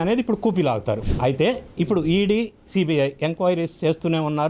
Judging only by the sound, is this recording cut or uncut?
cut